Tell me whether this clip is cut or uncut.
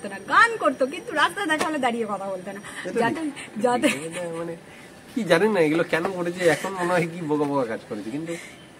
uncut